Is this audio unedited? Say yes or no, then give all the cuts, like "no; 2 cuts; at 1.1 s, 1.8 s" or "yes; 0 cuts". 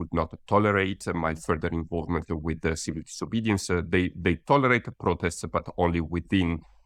yes; 0 cuts